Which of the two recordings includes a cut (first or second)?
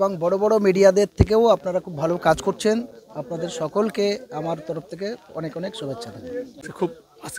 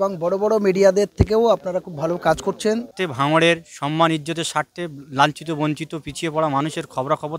second